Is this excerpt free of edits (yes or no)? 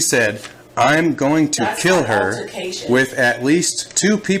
yes